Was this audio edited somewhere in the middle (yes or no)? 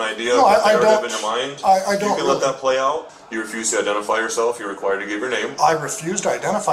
no